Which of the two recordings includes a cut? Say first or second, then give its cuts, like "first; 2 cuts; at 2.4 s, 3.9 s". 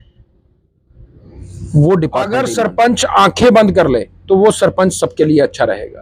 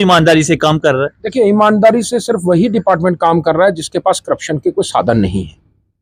first; 1 cut; at 2.5 s